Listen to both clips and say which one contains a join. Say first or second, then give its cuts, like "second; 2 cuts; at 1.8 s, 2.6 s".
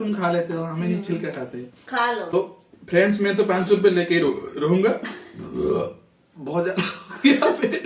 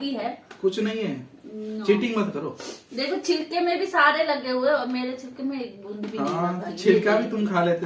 first; 1 cut; at 2.3 s